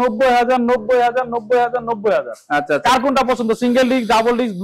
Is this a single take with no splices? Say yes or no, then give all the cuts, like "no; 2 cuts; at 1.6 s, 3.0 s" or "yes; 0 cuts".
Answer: yes; 0 cuts